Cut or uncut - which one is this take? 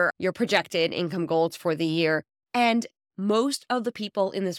cut